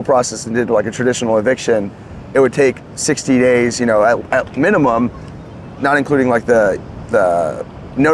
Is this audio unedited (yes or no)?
yes